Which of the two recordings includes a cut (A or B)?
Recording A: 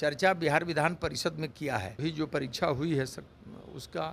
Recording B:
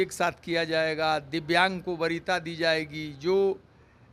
A